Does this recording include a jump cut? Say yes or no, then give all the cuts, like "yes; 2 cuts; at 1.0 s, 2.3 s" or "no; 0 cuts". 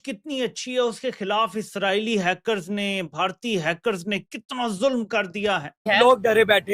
yes; 1 cut; at 5.8 s